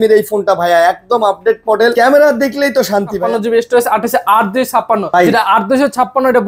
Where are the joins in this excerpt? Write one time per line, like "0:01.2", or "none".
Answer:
0:01.9
0:03.2
0:05.1